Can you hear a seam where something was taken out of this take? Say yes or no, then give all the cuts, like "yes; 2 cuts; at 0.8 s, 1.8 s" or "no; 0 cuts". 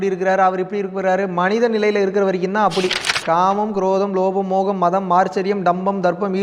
yes; 1 cut; at 3.2 s